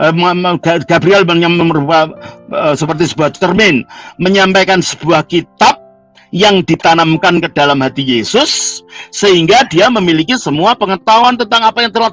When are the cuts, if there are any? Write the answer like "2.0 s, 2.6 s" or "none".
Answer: none